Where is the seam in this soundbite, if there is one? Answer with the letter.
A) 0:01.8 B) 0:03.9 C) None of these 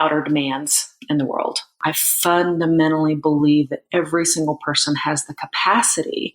A